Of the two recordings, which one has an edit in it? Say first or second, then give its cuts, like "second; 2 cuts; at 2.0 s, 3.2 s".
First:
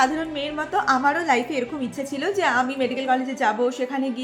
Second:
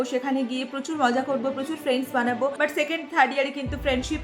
second; 1 cut; at 2.5 s